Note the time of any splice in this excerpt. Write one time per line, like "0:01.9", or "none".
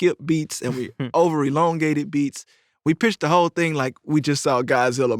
none